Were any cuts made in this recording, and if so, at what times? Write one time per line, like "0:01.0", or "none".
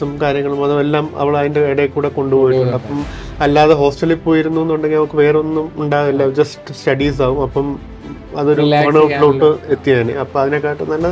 none